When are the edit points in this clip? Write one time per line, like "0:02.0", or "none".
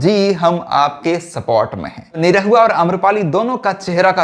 0:02.2